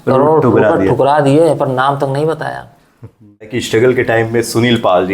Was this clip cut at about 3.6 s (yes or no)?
yes